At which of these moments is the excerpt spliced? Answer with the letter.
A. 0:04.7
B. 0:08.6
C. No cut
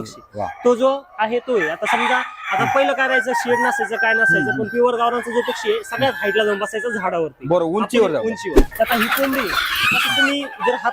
B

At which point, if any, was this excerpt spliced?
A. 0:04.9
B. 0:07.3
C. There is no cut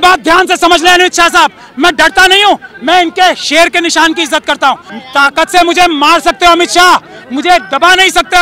A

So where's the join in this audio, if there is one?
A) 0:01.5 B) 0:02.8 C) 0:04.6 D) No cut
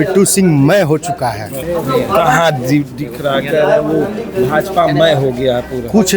A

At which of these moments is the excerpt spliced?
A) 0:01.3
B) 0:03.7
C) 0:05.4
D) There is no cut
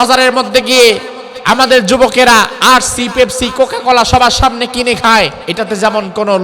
C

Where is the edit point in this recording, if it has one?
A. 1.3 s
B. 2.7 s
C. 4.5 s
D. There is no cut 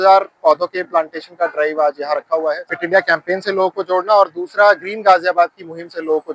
B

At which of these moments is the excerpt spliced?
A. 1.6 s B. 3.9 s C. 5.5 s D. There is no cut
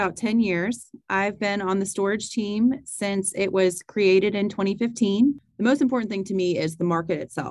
C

